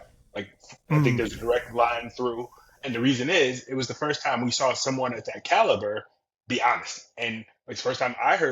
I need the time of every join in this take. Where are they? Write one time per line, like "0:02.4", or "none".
none

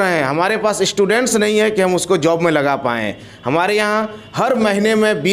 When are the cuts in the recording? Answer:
none

